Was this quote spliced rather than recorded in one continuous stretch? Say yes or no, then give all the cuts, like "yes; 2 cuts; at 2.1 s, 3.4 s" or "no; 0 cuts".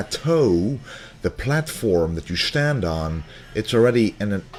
no; 0 cuts